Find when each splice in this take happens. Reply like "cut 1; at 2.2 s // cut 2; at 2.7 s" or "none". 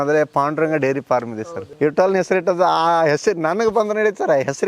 cut 1; at 1.6 s